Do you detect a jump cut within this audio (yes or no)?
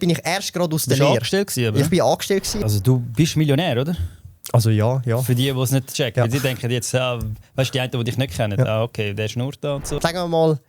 yes